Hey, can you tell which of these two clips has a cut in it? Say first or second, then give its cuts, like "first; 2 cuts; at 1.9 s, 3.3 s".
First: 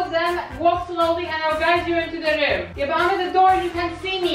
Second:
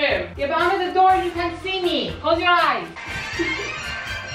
second; 1 cut; at 2.9 s